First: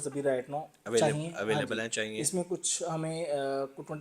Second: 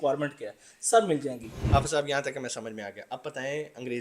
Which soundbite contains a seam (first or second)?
second